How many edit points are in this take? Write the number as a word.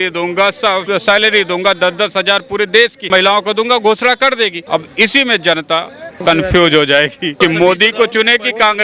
five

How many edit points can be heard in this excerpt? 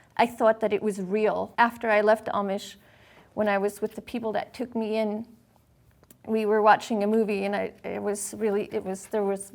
one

